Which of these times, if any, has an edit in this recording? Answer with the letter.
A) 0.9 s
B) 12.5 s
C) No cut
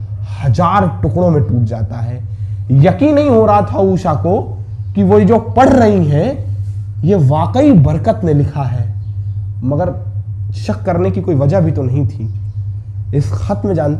C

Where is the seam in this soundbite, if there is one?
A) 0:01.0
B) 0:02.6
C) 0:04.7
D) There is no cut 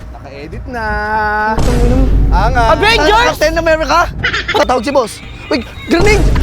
C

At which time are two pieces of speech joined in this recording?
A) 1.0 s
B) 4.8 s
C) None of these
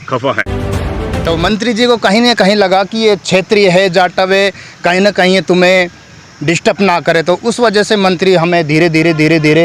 A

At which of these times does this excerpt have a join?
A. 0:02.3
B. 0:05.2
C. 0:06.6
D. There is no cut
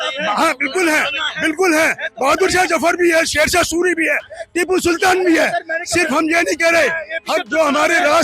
D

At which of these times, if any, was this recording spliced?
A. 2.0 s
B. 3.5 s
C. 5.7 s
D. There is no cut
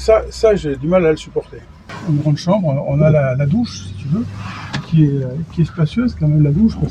A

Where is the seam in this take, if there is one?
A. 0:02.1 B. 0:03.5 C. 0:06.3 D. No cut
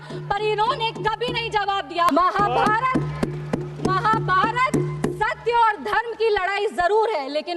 A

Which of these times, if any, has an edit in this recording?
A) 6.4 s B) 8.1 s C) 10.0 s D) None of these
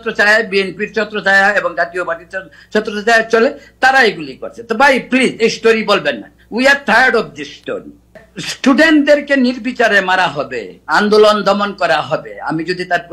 B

